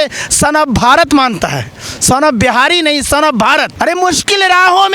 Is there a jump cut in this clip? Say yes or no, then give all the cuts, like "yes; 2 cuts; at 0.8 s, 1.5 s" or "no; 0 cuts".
yes; 1 cut; at 3.7 s